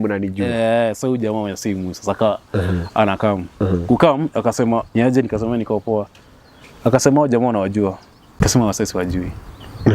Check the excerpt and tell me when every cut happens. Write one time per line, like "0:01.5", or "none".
0:04.9
0:08.4